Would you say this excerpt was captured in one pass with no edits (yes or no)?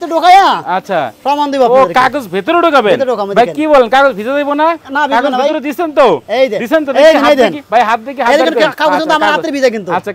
yes